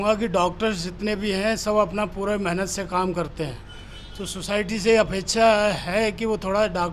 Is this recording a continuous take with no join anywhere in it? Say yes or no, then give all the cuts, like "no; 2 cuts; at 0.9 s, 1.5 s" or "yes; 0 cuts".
yes; 0 cuts